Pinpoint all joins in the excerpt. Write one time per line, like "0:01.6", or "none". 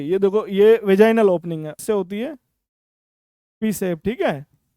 0:01.8